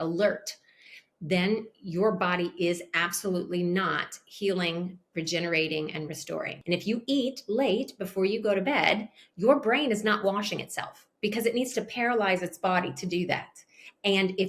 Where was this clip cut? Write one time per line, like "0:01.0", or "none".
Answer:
0:06.5